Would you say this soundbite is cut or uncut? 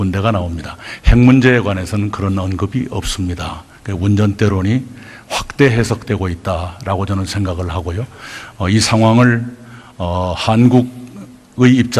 cut